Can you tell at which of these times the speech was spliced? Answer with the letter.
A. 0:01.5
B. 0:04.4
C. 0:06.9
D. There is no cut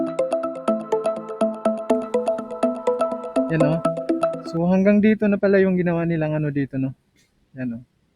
B